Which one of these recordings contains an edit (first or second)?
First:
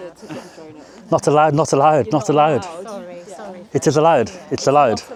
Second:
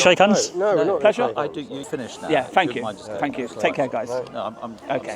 second